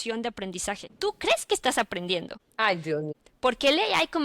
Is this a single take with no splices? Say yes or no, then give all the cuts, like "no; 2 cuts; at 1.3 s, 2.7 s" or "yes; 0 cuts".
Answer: no; 3 cuts; at 0.9 s, 2.4 s, 3.2 s